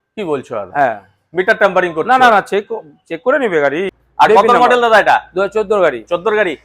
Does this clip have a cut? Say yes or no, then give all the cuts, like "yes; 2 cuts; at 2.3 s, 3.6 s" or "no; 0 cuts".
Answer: yes; 1 cut; at 3.9 s